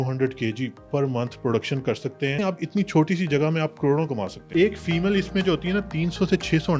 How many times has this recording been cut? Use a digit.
2